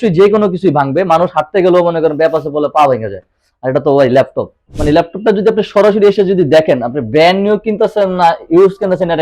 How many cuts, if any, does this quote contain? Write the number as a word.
one